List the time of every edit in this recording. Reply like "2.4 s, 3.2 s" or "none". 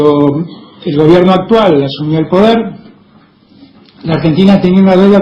none